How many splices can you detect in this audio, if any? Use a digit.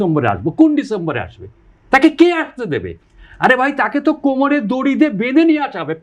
0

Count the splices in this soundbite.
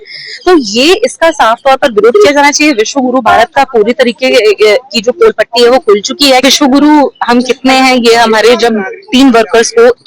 1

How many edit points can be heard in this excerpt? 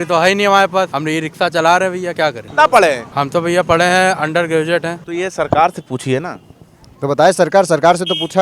4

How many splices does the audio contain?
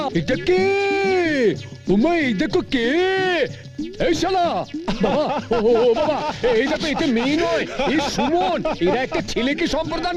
0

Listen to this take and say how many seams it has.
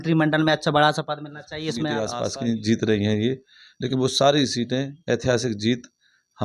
1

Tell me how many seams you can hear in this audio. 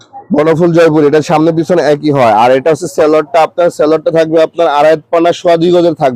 0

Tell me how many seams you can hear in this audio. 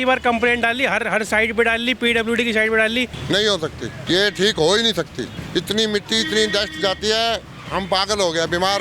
3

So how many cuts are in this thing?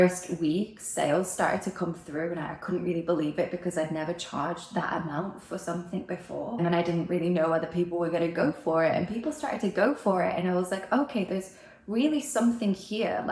1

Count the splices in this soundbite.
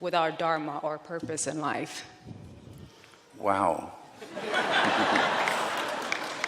0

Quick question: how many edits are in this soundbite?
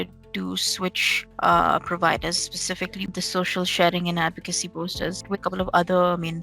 2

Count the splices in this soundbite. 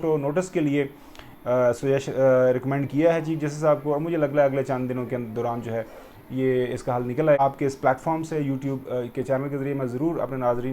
1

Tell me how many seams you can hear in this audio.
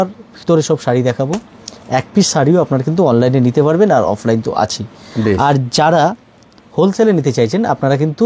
0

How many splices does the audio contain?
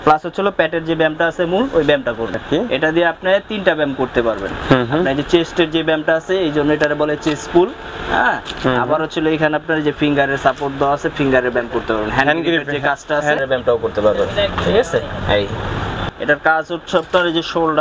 3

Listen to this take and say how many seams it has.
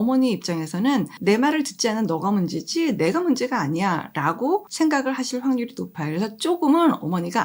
2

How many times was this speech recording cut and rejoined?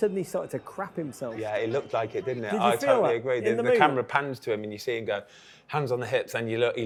0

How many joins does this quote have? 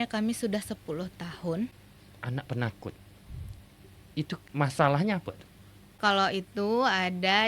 3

